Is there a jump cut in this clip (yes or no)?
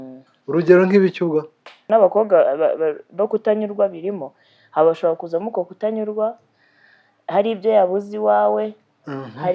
yes